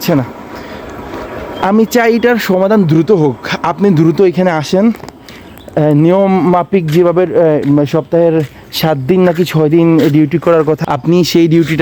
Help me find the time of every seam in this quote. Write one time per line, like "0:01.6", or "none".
0:10.8